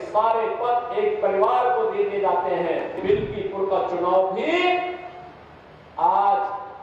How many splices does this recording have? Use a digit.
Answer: 1